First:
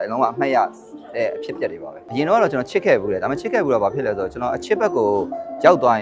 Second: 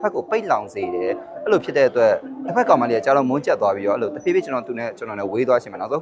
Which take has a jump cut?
first; 1 cut; at 2.0 s

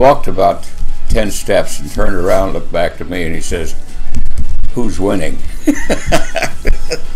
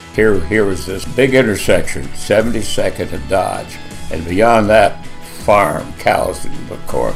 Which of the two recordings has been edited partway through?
second; 1 cut; at 1.0 s

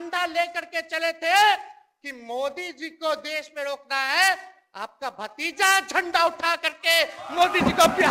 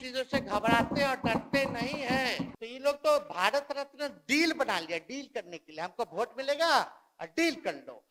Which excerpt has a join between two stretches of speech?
second; 1 cut; at 2.5 s

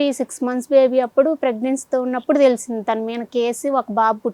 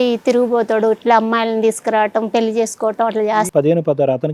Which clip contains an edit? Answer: second; 1 cut; at 3.5 s

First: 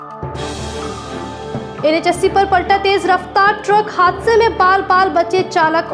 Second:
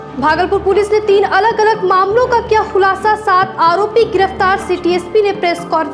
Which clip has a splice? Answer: first; 1 cut; at 1.7 s

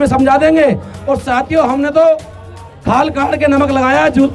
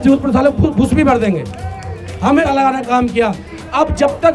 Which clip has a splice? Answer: second; 1 cut; at 2.4 s

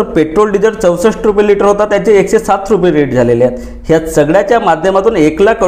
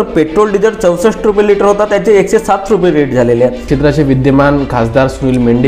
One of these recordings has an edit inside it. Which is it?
second; 1 cut; at 3.7 s

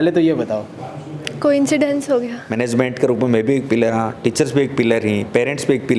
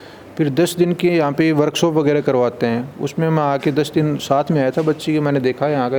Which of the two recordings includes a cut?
first; 1 cut; at 2.4 s

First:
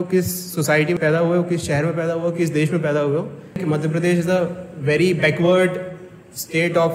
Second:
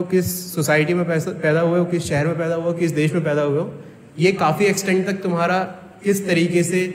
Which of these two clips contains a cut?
first; 2 cuts; at 1.0 s, 3.6 s

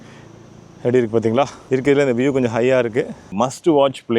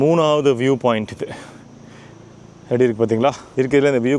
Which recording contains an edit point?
first; 1 cut; at 3.2 s

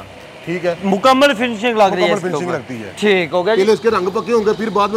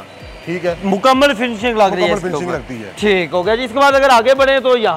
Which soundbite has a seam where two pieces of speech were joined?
first; 1 cut; at 3.6 s

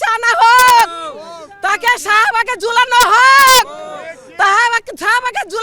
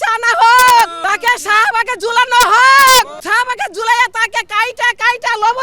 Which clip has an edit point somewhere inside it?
second; 2 cuts; at 1.0 s, 3.2 s

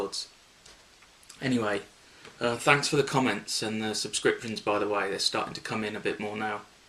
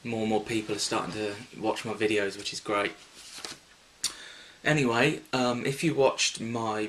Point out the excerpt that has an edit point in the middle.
first; 1 cut; at 5.6 s

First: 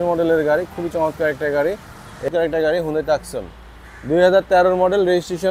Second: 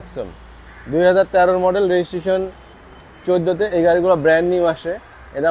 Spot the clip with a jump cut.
first; 1 cut; at 2.3 s

